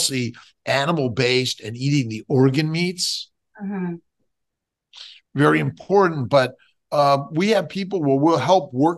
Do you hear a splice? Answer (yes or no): no